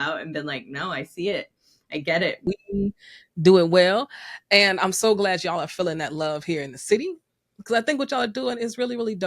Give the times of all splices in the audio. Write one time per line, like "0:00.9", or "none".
0:02.5